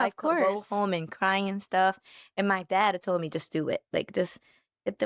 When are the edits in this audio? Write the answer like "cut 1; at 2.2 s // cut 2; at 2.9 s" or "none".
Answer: none